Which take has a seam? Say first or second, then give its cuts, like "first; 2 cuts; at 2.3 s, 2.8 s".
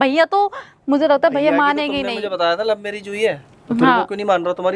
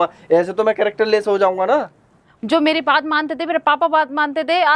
second; 1 cut; at 2.3 s